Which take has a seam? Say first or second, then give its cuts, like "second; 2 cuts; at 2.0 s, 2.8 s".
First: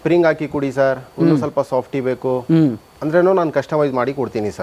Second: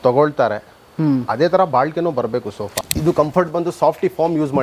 second; 1 cut; at 2.9 s